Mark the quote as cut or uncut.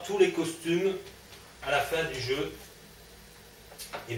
uncut